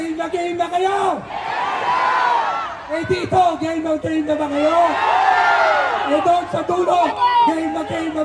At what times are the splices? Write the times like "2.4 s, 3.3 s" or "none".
none

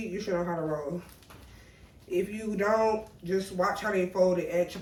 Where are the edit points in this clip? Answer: none

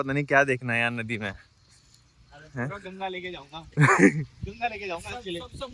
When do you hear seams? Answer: none

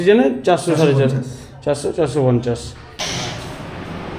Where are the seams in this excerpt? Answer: 3.0 s

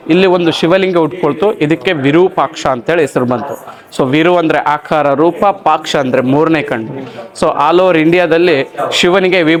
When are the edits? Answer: none

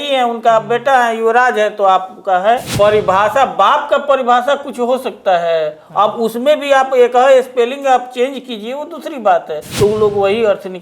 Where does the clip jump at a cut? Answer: 2.7 s, 9.6 s

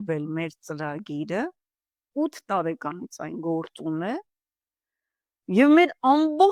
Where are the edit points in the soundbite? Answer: none

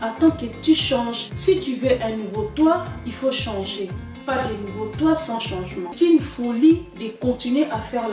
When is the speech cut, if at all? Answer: 5.9 s

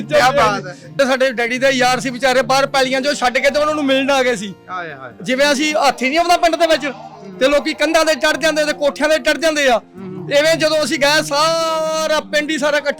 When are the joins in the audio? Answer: 1.0 s

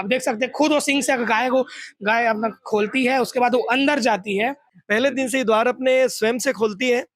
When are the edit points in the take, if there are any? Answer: 4.7 s

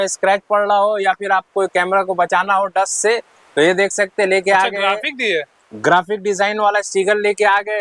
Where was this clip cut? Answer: none

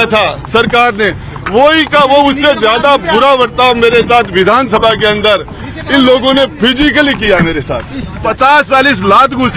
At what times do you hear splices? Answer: 8.2 s

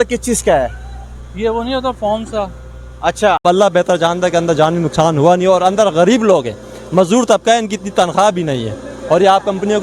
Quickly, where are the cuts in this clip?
3.4 s

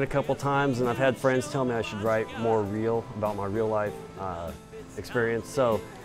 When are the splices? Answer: none

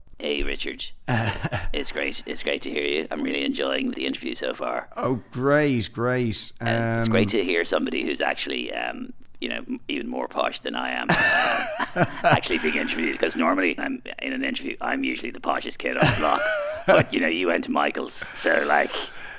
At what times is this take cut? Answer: 3.9 s, 13.8 s

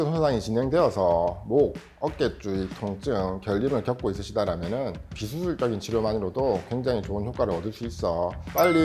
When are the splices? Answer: 5.1 s

